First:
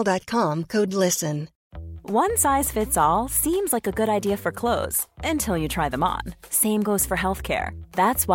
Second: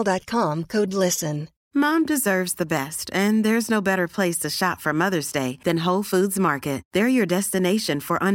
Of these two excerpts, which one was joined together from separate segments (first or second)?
second